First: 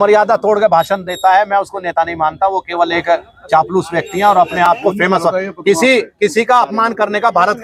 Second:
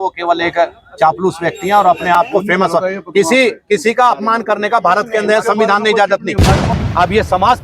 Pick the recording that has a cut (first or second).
second